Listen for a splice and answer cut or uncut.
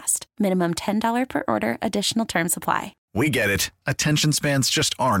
cut